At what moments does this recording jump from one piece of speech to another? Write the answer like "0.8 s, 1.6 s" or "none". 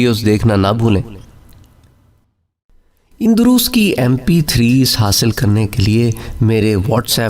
2.5 s